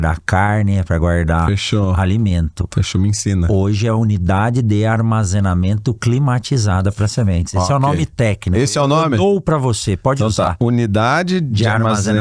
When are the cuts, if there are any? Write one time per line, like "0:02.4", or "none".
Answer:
none